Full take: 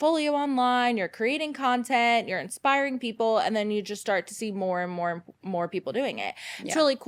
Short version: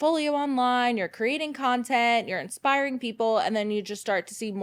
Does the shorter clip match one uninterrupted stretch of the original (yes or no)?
yes